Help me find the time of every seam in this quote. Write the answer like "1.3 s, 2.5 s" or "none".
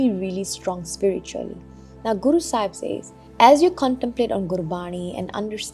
3.2 s